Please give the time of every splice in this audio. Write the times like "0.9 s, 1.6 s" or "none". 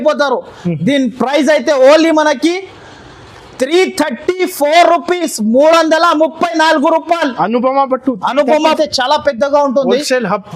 8.6 s